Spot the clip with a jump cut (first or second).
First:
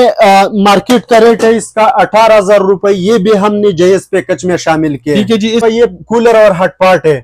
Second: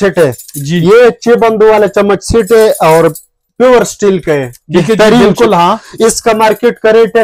first